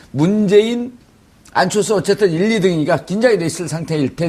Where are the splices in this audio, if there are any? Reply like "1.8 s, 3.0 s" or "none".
none